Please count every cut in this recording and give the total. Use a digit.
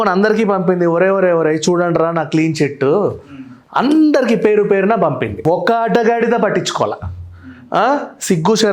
1